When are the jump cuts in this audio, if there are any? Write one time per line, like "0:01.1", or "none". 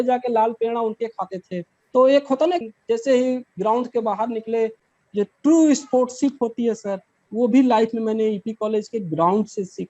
0:02.6